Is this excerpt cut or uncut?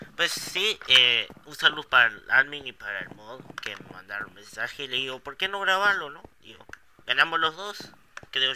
uncut